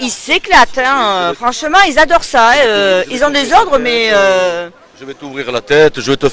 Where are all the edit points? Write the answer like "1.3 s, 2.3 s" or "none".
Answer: none